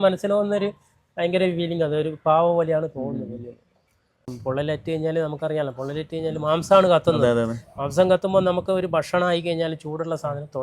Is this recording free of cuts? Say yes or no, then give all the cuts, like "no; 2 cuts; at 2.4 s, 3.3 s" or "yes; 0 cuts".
no; 1 cut; at 4.3 s